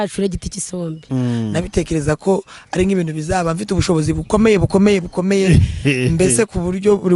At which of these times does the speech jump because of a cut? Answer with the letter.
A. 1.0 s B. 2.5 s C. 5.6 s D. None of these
A